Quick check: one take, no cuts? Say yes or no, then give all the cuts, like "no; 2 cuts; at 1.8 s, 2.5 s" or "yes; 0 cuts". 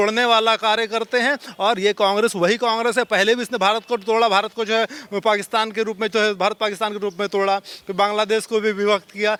yes; 0 cuts